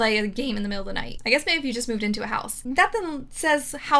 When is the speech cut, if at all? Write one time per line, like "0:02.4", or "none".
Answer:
0:01.1